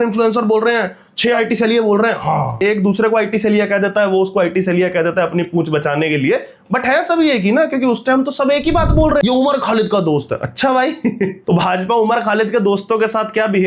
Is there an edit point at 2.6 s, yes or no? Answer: yes